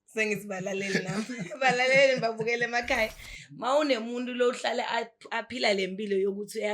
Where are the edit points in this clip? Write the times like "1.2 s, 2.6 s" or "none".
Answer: none